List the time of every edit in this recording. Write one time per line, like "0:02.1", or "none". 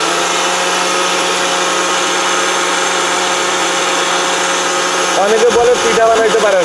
none

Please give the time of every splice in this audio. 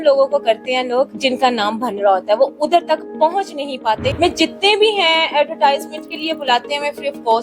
0:01.1
0:04.1

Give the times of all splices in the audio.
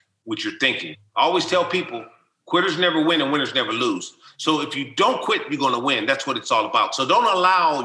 0:00.9

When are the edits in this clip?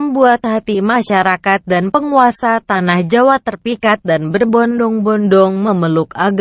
none

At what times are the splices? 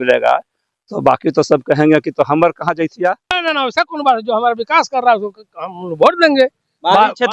0:03.4

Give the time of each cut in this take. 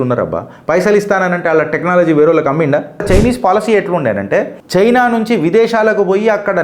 0:03.0

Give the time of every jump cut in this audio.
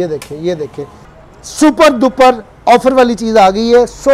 0:01.1

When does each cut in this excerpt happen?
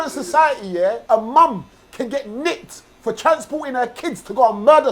0:01.0

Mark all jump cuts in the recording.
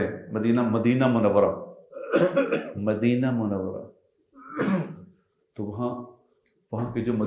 none

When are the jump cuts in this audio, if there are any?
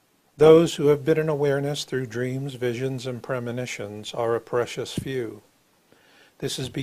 0:03.9

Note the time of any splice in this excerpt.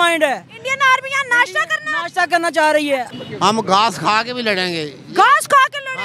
0:03.1

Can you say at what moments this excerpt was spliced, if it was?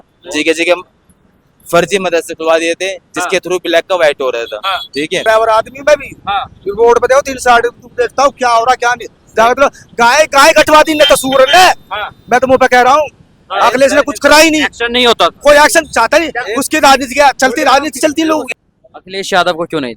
0:05.2
0:18.5

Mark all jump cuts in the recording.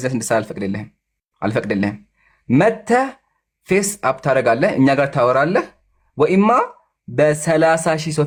none

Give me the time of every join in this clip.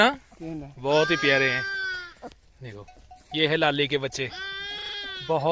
none

